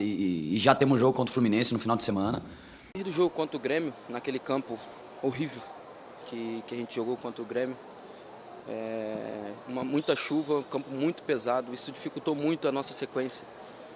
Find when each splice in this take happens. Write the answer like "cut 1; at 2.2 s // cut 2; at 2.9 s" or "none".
cut 1; at 3.0 s